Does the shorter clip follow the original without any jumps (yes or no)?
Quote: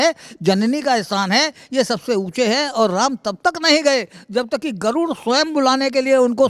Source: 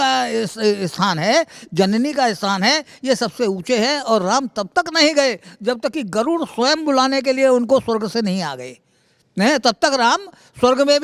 yes